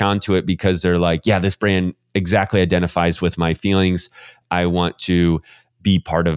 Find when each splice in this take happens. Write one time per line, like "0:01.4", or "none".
0:04.4

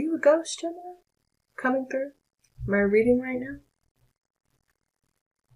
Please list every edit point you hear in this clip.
none

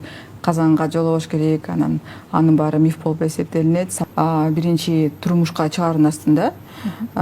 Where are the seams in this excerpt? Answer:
0:03.9

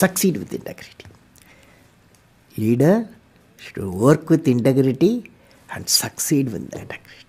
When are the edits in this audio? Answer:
none

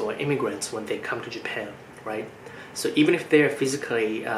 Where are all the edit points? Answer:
none

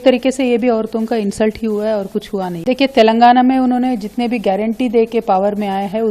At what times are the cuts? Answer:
0:02.6

